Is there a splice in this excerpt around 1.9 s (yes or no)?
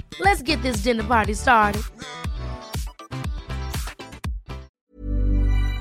no